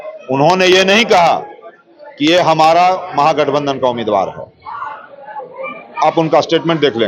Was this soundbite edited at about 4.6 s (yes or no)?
no